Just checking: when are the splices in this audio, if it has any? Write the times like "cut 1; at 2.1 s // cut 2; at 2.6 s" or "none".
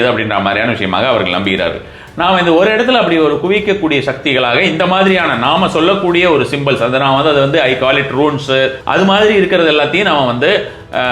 cut 1; at 8.8 s